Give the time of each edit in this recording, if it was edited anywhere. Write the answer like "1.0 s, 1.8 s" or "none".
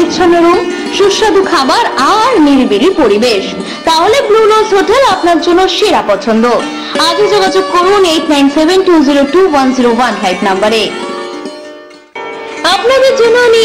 none